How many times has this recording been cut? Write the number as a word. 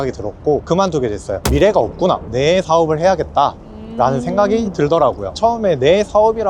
one